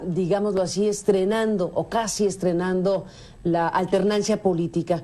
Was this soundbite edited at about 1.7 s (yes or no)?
yes